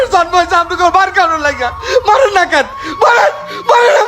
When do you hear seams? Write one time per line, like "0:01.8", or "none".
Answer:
0:01.7